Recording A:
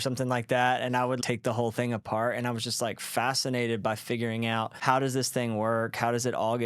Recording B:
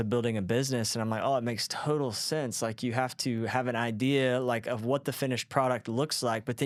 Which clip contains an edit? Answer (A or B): A